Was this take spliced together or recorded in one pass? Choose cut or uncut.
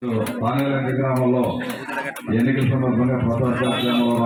uncut